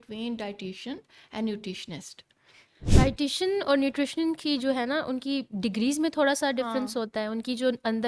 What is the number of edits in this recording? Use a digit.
0